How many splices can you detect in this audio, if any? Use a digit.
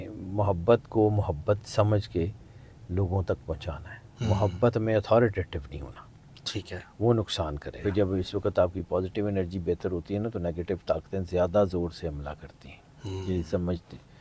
1